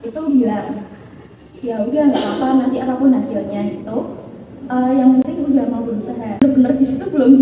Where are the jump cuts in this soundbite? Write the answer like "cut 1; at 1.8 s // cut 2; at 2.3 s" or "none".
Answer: cut 1; at 6.4 s